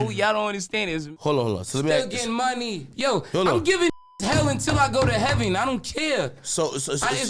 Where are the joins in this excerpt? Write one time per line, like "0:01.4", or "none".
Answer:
0:01.1